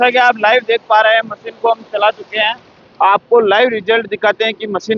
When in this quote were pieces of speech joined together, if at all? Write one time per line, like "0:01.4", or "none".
none